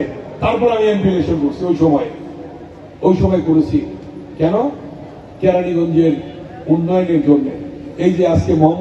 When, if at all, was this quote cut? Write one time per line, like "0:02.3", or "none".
none